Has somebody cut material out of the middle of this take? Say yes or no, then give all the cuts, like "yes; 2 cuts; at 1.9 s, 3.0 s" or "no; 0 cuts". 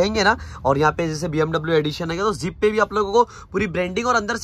no; 0 cuts